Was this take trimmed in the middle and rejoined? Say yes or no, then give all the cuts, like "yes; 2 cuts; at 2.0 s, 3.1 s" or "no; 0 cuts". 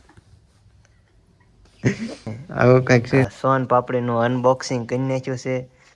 yes; 1 cut; at 3.3 s